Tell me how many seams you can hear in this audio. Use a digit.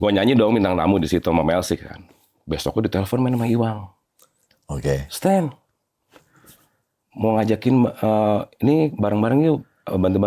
0